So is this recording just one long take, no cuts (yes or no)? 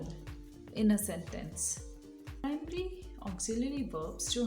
no